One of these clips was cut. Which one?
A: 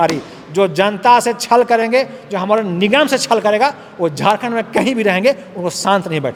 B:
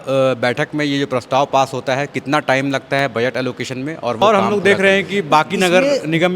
B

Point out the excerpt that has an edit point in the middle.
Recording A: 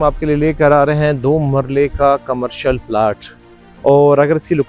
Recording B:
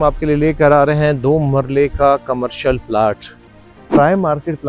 B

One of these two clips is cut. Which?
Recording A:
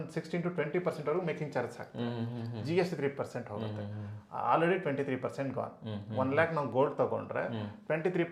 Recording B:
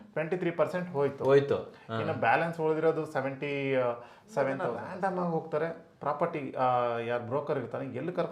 B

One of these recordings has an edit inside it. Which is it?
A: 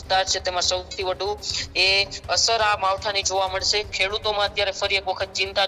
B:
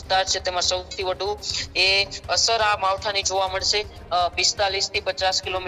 A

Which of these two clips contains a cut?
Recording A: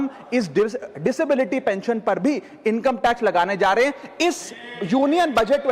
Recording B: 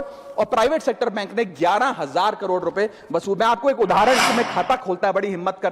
B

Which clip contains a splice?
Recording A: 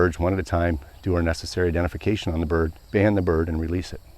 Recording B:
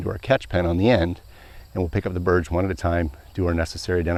A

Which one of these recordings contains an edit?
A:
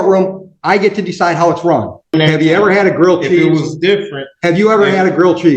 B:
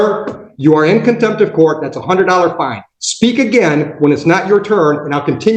A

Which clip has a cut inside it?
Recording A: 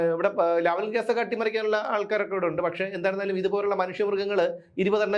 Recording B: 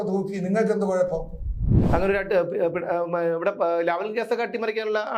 B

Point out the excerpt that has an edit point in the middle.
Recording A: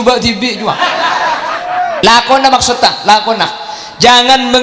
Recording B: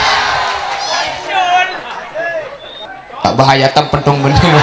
B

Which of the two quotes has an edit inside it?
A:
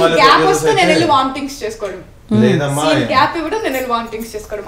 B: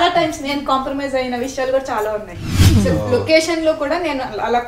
B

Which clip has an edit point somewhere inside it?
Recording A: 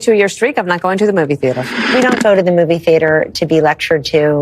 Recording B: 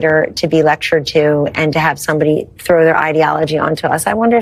A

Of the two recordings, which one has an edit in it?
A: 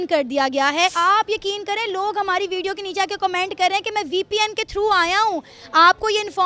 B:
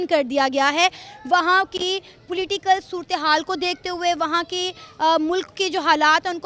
A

